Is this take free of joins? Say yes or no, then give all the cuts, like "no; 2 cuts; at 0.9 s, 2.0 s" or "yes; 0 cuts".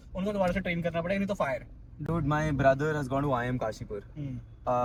yes; 0 cuts